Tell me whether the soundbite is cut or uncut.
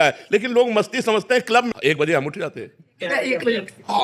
cut